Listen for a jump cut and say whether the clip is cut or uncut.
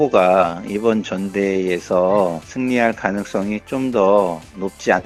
uncut